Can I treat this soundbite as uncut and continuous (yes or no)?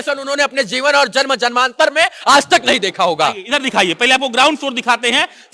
yes